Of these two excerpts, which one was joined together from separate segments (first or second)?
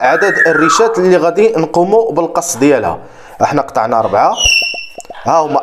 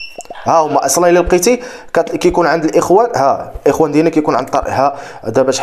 first